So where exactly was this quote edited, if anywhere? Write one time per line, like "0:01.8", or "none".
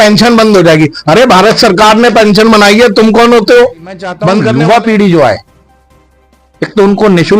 0:04.4